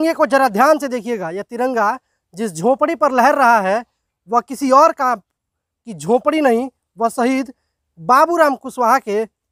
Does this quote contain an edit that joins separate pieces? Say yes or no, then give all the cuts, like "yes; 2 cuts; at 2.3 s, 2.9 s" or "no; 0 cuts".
no; 0 cuts